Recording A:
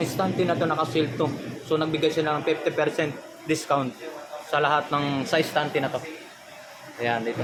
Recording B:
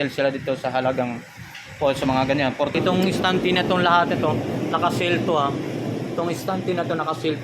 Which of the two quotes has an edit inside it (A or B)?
B